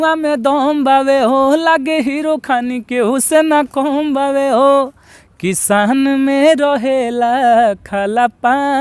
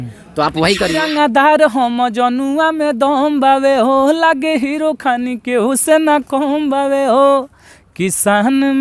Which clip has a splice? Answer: second; 1 cut; at 1.0 s

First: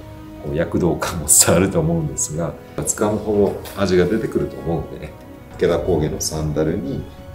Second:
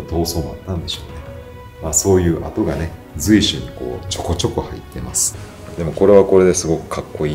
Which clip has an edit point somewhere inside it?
first; 2 cuts; at 2.9 s, 5.4 s

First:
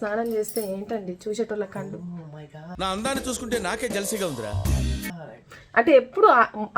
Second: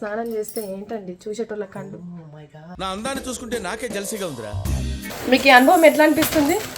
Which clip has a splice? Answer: second; 1 cut; at 5.1 s

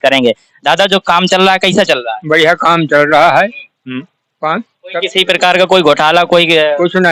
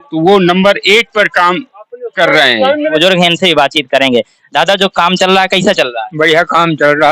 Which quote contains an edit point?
second; 1 cut; at 3.0 s

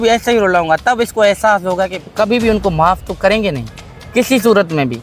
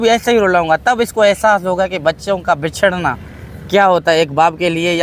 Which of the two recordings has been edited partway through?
first; 1 cut; at 1.9 s

